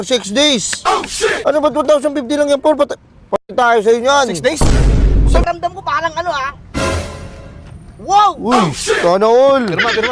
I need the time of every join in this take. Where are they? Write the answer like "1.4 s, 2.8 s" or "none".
5.4 s